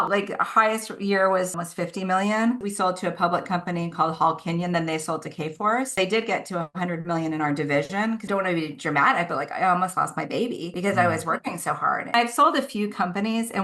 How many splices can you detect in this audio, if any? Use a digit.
3